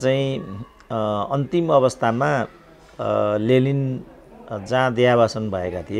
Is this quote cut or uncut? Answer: uncut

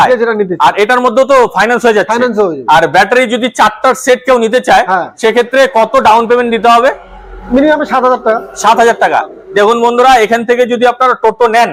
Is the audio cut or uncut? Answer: uncut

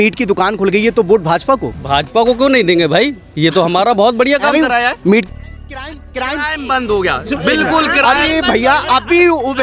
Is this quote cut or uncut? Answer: cut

